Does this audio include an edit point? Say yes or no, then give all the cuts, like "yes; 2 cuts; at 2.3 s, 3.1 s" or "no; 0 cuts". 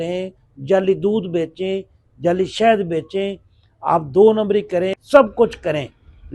yes; 1 cut; at 5.0 s